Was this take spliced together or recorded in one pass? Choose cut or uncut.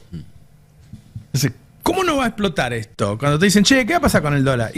uncut